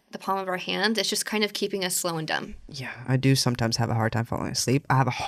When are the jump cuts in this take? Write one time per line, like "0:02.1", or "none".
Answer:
none